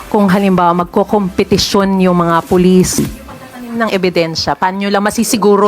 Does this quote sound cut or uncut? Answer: cut